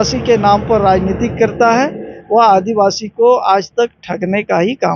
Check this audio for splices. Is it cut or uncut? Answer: uncut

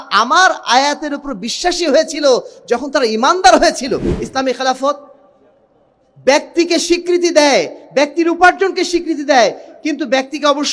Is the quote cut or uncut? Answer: cut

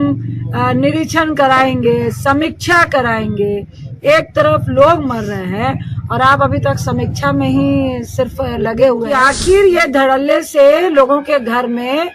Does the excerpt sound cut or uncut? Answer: cut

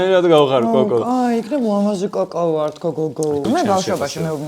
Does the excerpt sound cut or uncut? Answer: cut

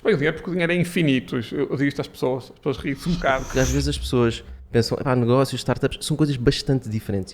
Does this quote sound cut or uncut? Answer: cut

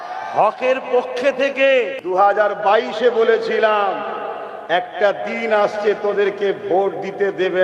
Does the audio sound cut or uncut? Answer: cut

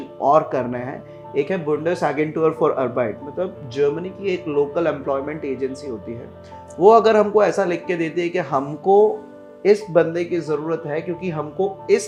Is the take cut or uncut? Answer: uncut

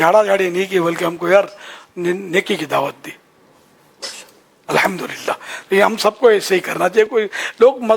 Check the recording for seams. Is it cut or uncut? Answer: uncut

